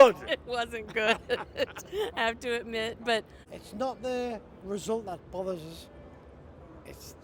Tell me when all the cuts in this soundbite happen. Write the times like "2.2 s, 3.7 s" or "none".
3.4 s